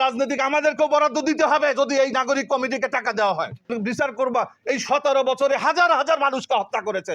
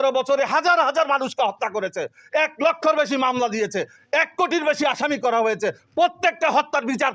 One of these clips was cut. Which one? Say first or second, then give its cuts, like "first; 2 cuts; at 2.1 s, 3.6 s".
first; 1 cut; at 3.7 s